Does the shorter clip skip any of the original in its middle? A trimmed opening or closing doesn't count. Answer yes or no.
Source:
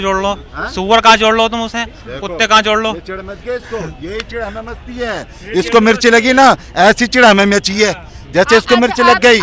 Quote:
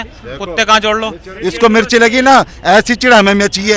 yes